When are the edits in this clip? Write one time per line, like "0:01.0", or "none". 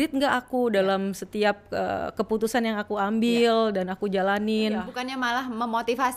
0:05.0

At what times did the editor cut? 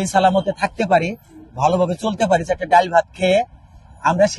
none

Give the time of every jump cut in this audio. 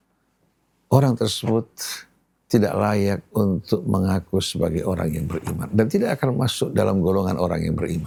none

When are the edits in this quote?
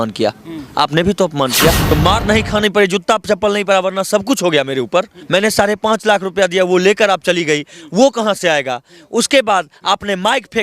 0:01.8
0:05.2

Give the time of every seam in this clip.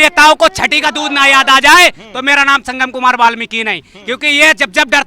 none

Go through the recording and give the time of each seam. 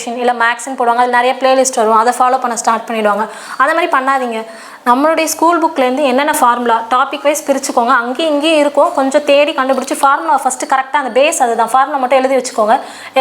none

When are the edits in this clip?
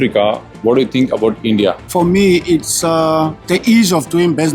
0:01.9

